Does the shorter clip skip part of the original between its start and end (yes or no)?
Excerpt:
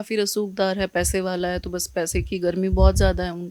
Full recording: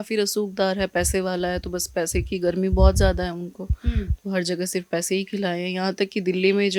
no